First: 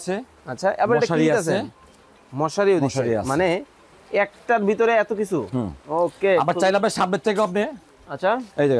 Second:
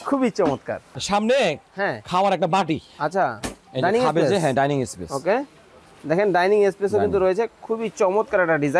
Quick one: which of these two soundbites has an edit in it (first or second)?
second